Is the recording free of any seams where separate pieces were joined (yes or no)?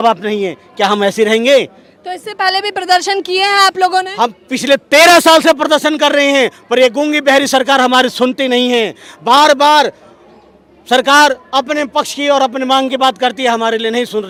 yes